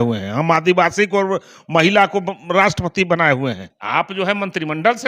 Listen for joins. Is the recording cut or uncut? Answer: cut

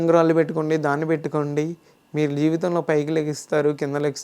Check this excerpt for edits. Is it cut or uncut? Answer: uncut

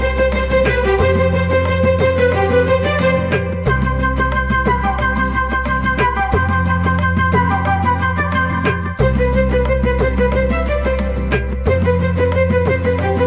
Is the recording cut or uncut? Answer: uncut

